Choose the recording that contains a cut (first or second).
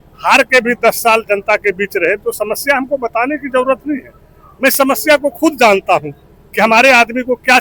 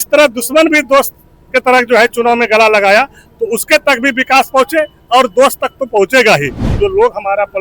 second